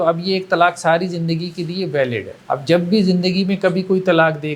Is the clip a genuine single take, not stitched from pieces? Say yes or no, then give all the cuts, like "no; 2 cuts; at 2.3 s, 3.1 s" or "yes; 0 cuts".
no; 1 cut; at 2.3 s